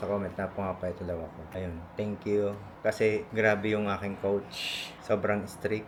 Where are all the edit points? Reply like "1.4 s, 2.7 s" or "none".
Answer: none